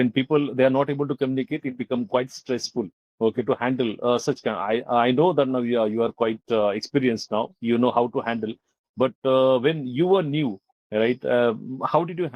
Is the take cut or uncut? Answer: uncut